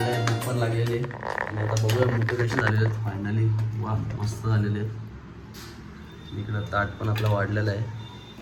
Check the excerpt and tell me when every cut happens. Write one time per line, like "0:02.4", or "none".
none